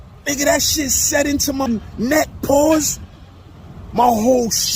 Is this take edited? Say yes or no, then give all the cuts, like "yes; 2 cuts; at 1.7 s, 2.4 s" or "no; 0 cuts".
yes; 1 cut; at 1.7 s